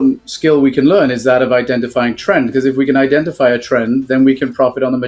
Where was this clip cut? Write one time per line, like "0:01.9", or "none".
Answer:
none